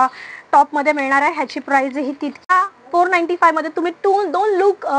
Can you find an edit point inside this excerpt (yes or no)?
yes